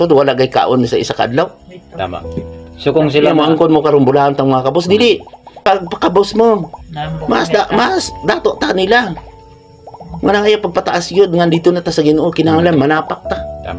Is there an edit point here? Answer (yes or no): yes